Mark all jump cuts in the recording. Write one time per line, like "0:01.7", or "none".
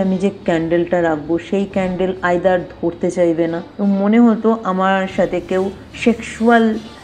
0:03.7
0:05.8